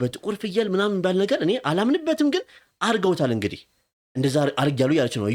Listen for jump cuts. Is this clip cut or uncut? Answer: uncut